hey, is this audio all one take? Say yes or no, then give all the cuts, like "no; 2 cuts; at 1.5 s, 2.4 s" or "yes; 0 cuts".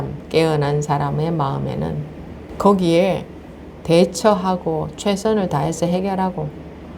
no; 1 cut; at 2.4 s